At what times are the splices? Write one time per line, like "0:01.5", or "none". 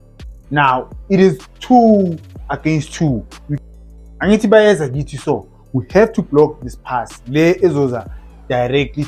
0:03.4